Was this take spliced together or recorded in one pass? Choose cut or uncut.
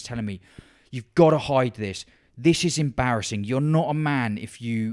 uncut